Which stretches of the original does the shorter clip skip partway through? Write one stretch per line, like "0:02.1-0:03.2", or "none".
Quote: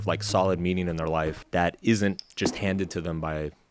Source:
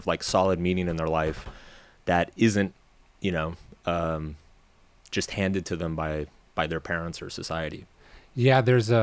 0:01.4-0:01.9
0:02.8-0:05.0